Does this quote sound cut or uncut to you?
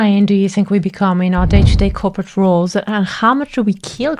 uncut